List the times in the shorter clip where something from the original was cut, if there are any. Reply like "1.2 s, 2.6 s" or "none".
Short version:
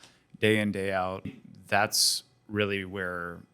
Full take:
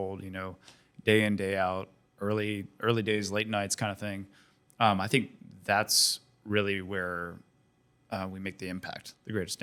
1.4 s